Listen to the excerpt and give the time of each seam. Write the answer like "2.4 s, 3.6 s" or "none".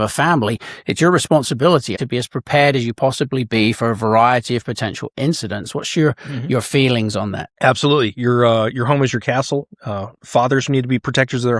2.0 s, 7.5 s